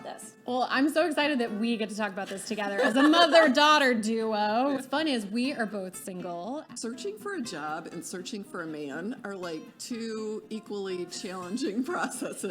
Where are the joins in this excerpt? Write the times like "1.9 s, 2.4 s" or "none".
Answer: 4.8 s, 6.7 s